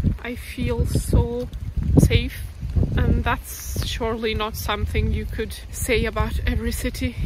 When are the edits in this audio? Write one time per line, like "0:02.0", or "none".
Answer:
0:01.7
0:02.6
0:05.7